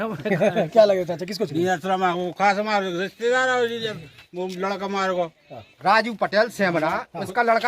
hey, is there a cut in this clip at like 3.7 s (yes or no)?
no